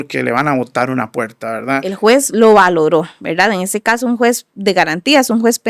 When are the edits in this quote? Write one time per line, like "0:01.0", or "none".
0:01.8